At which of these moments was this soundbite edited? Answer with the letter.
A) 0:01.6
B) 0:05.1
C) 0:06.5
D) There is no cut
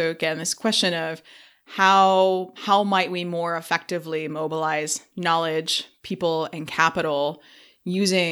D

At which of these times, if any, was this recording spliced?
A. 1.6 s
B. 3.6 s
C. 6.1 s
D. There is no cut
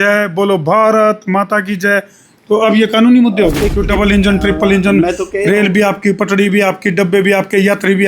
B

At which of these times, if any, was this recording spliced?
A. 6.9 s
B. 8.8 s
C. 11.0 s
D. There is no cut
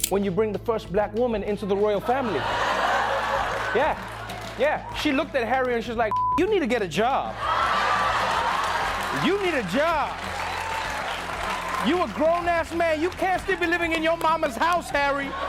D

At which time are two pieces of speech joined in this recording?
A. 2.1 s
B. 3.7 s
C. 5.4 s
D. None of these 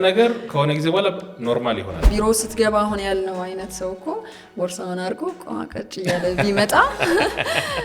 A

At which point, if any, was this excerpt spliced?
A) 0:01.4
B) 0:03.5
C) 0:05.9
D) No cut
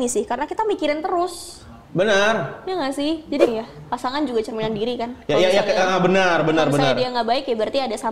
B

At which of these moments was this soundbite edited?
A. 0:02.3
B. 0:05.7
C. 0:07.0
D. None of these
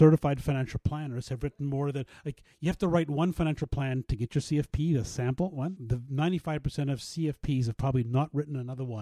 B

